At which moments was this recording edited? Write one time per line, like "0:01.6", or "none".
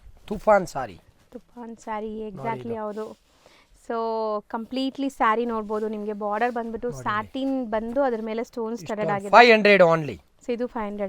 none